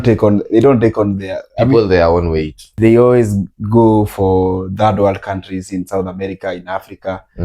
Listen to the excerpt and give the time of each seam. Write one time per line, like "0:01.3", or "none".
0:02.6